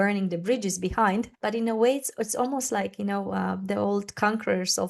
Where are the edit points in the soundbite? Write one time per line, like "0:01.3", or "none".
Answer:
0:01.3